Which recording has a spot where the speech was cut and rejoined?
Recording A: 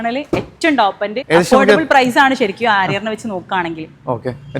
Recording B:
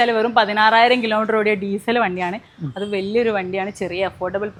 A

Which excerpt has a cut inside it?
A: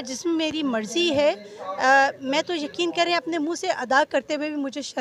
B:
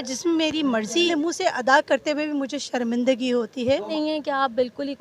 B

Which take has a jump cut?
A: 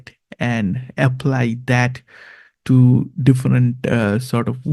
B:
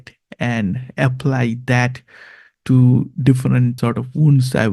B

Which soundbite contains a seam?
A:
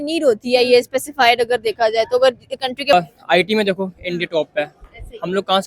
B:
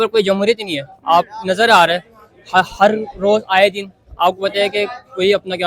A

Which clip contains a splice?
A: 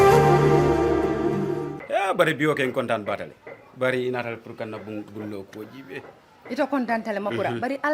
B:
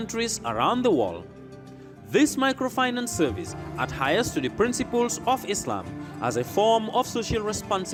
A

